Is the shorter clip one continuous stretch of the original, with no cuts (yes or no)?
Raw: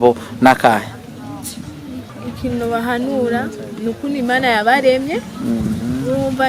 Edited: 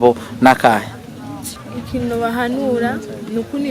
no